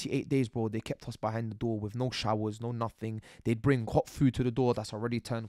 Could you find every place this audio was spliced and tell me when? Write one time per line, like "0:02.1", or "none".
none

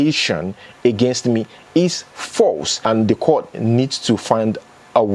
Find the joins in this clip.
0:02.8

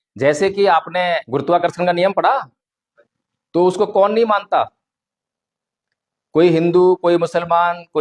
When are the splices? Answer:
0:01.2

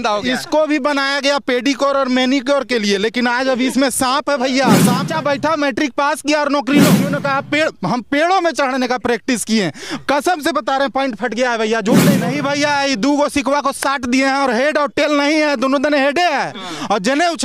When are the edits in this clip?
0:05.1
0:07.1
0:12.3

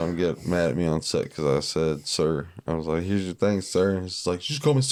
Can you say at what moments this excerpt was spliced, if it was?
none

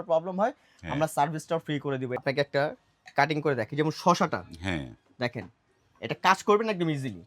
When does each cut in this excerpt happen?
0:02.2

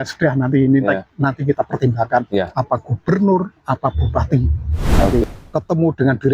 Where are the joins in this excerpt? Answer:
0:05.2

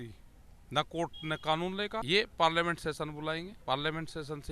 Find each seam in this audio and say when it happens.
0:02.0
0:03.5

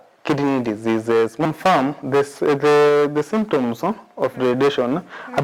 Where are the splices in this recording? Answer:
0:01.5

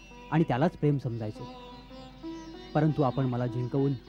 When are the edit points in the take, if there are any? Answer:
none

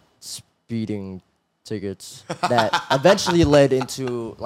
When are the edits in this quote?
none

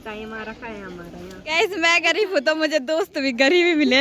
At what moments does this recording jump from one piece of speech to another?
0:01.5

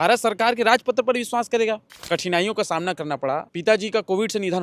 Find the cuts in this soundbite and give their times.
0:01.9
0:03.5

